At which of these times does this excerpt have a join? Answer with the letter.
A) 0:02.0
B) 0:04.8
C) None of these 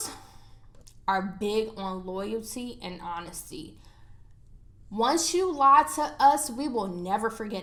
C